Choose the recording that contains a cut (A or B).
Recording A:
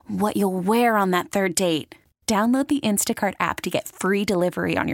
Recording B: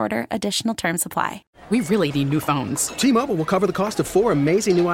B